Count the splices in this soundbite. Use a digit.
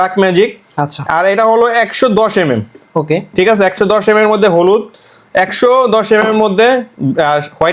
0